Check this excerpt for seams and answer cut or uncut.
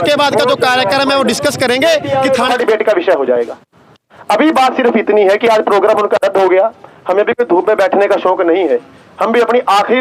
cut